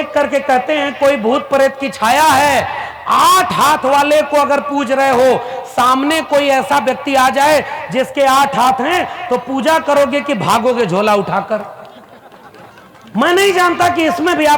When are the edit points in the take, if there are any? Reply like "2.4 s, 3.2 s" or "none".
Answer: none

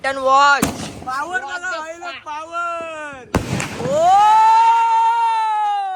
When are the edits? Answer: none

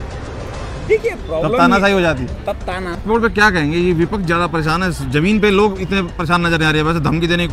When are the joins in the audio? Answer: 3.0 s

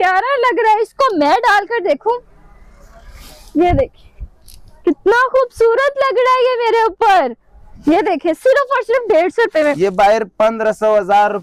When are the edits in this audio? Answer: none

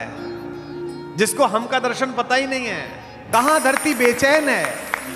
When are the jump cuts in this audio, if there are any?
3.1 s

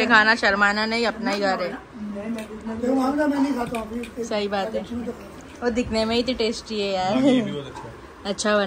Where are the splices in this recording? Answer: none

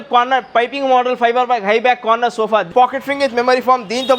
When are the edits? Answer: 2.7 s

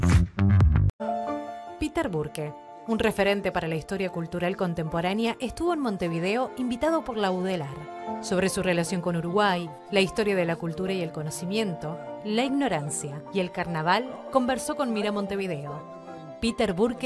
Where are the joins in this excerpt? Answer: 0.9 s

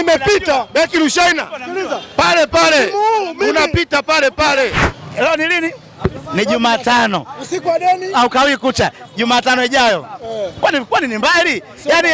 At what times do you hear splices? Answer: 4.9 s

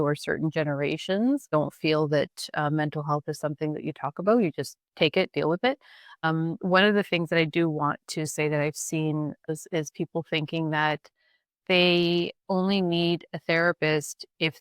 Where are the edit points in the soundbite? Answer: 1.5 s, 4.8 s, 6.2 s, 9.5 s, 12.4 s

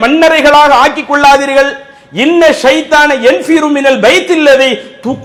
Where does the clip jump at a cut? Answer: none

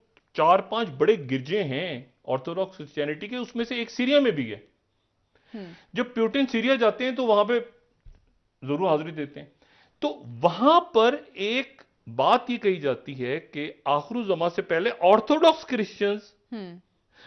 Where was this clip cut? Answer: none

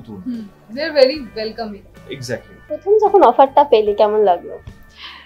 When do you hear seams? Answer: 2.5 s

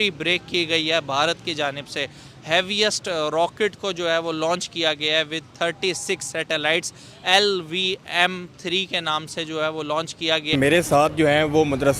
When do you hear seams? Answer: 10.5 s

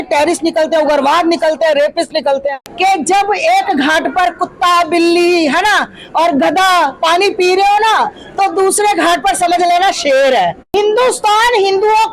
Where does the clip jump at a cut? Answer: 2.6 s, 10.6 s

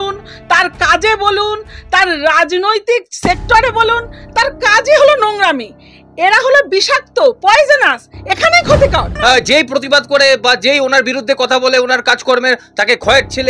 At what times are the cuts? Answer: 9.1 s

